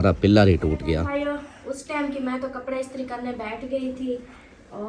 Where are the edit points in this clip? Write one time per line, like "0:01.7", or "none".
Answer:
0:01.0